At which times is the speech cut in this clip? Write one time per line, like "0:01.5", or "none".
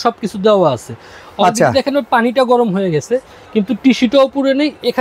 none

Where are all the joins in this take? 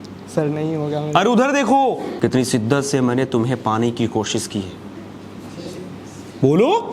0:02.1

